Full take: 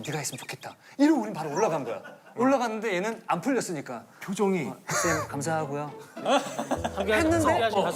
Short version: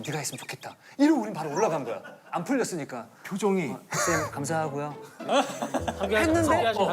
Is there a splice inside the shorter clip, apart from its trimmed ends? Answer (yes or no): yes